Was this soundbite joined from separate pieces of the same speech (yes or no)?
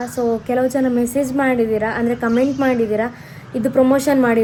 no